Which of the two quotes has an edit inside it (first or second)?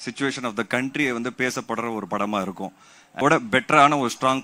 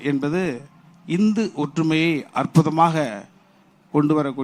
first